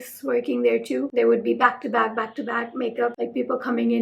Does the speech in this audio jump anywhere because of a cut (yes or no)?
yes